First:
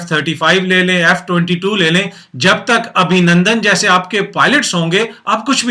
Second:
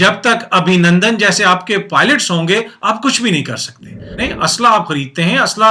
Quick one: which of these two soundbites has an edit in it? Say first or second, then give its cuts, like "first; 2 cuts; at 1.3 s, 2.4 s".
second; 1 cut; at 4.2 s